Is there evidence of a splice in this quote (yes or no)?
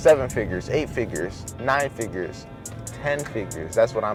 no